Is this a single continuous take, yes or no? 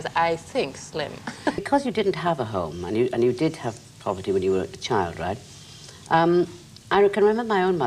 yes